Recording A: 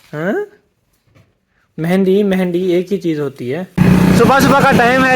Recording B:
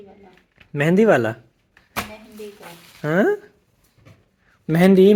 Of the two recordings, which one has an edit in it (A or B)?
A